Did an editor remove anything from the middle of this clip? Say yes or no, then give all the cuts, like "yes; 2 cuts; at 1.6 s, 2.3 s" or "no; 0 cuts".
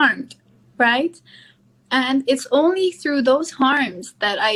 no; 0 cuts